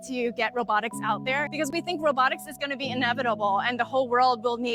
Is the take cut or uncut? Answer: uncut